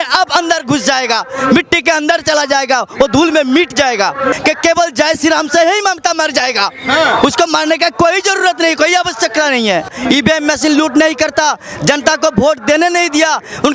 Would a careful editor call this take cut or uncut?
cut